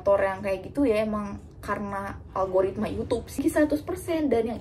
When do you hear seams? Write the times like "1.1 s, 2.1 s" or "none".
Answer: 3.4 s